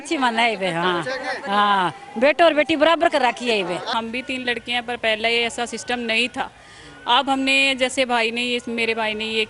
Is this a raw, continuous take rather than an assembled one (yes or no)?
no